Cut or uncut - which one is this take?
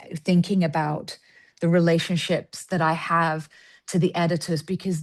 uncut